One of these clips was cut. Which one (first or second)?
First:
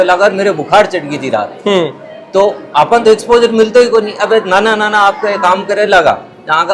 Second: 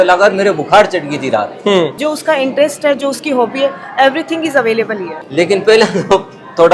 second